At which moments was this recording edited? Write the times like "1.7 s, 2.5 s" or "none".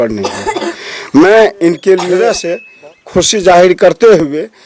2.3 s